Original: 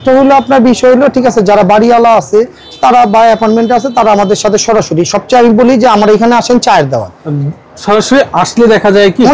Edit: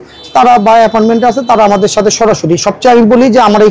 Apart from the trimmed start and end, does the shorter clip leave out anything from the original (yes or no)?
no